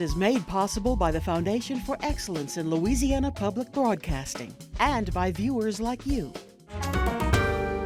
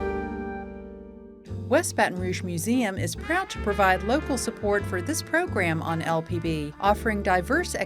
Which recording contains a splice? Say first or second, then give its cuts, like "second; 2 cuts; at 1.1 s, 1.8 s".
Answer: second; 1 cut; at 1.1 s